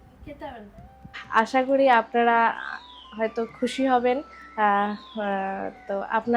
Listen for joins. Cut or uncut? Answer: cut